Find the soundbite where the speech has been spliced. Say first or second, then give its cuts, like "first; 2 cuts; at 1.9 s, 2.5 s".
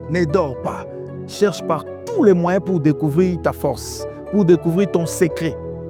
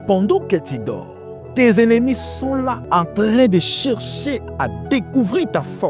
second; 1 cut; at 2.9 s